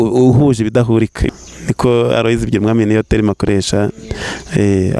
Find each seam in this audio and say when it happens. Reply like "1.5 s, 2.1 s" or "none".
1.2 s